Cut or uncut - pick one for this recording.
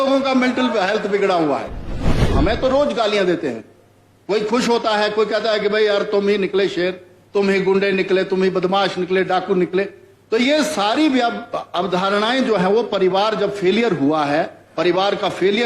cut